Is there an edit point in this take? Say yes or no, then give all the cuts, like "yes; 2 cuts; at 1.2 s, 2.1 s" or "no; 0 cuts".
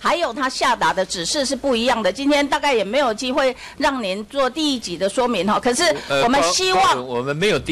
no; 0 cuts